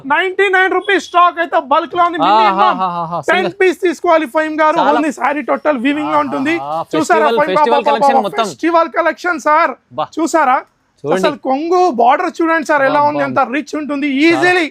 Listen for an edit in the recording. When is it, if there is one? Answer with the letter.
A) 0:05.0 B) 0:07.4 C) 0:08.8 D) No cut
A